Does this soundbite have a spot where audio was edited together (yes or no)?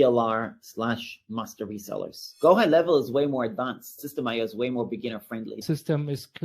yes